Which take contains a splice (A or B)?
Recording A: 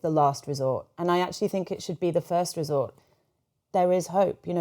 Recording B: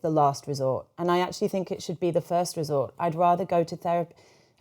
A